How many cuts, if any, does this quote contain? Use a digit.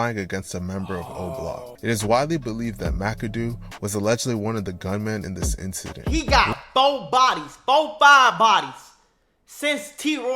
1